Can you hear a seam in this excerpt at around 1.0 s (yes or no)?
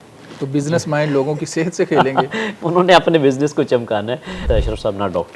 no